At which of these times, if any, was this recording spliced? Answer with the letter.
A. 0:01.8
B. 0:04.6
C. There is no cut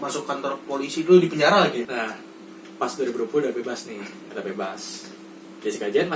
A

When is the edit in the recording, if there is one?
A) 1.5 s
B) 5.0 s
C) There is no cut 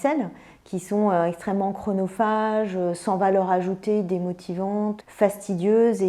B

